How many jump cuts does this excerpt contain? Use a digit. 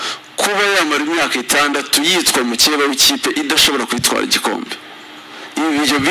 0